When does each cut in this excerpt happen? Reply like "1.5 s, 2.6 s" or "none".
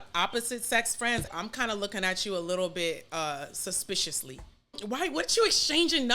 1.3 s, 4.8 s